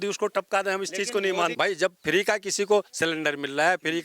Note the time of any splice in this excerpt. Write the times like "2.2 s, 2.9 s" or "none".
1.5 s